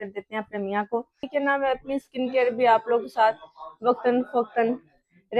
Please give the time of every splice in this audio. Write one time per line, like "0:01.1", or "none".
0:01.2

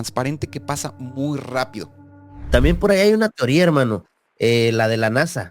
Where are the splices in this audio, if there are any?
0:02.5

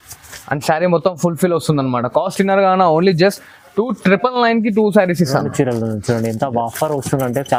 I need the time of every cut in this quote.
none

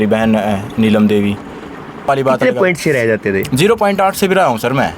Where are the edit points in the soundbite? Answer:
0:02.1

